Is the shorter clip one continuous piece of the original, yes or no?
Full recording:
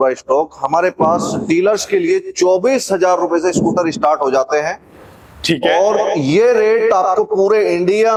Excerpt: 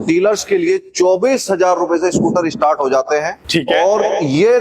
no